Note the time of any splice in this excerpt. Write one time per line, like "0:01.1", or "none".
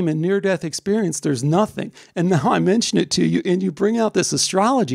none

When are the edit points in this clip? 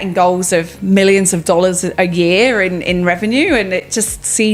none

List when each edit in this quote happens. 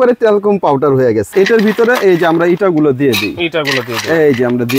0:01.3

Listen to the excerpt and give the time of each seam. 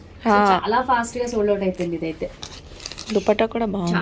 none

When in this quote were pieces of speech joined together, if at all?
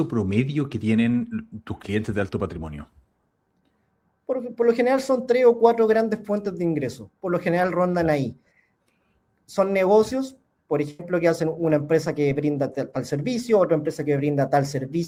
none

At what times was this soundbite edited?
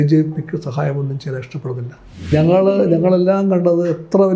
0:02.3

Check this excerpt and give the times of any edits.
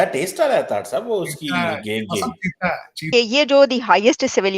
0:03.1

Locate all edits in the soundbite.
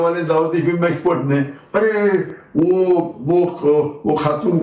none

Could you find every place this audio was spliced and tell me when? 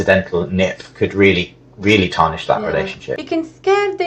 0:03.1

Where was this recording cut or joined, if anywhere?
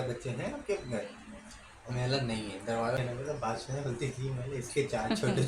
0:03.0

